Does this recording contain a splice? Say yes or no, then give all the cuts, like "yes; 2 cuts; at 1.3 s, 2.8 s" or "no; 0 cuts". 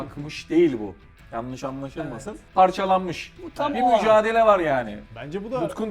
yes; 1 cut; at 5.0 s